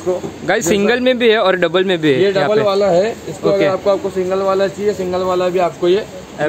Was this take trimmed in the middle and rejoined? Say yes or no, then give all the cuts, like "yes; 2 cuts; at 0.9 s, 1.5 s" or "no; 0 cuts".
no; 0 cuts